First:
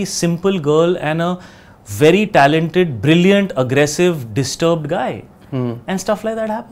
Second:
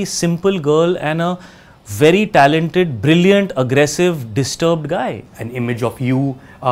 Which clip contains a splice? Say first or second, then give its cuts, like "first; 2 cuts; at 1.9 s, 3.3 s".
second; 1 cut; at 5.3 s